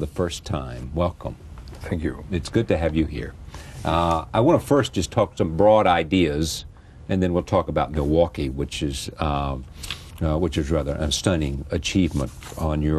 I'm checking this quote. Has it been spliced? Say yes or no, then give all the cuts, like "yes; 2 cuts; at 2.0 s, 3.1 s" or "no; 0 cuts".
yes; 1 cut; at 3.4 s